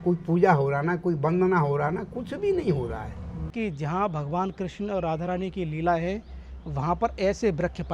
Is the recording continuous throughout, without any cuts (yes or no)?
no